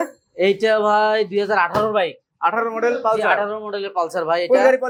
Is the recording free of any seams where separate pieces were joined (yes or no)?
yes